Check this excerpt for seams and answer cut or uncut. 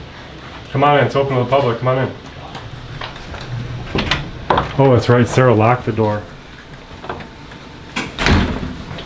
uncut